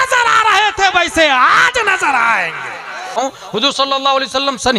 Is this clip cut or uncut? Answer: cut